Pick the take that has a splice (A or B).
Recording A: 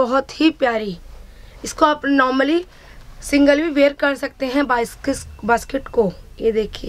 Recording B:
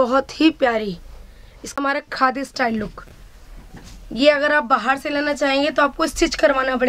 B